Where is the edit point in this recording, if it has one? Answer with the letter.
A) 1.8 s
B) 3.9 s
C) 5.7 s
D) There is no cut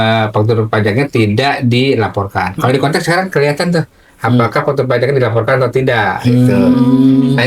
D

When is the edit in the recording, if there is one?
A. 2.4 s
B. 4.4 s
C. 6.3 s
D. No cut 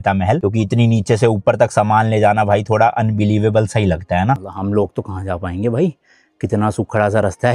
B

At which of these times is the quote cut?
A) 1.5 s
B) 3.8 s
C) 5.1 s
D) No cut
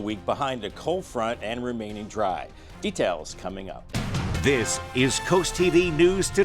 B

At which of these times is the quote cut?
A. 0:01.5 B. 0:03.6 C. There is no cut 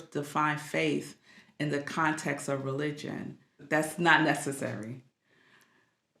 B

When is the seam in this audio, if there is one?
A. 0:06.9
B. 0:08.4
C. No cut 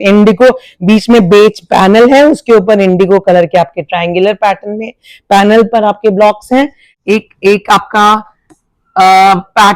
A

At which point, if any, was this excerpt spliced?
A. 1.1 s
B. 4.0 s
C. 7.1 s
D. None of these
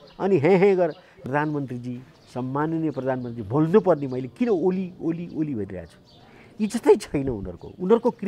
A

